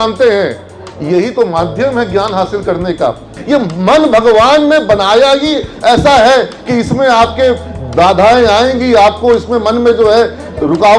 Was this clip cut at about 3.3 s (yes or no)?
yes